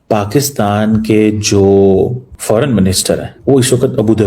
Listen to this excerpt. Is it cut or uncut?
cut